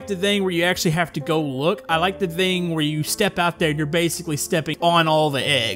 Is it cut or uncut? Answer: cut